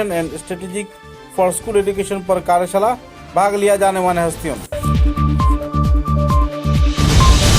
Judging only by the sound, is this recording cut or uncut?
cut